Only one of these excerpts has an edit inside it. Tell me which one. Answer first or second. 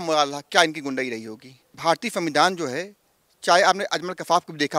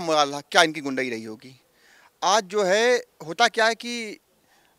first